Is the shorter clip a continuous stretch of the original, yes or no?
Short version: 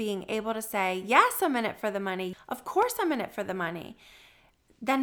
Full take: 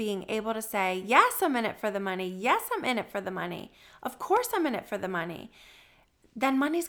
no